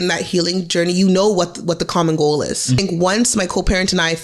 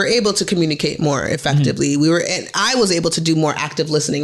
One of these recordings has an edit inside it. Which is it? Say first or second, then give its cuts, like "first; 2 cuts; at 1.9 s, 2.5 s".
first; 1 cut; at 2.8 s